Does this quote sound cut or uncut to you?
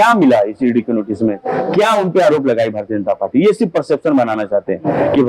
uncut